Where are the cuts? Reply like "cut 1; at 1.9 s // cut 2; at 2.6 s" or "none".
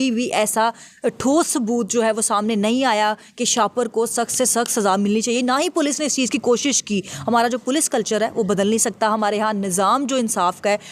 none